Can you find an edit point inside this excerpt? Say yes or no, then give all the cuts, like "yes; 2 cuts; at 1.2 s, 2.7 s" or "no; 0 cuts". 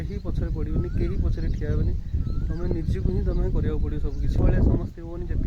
yes; 1 cut; at 4.4 s